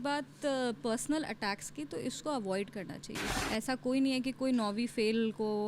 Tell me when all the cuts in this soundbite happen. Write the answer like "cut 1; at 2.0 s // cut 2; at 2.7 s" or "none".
cut 1; at 3.2 s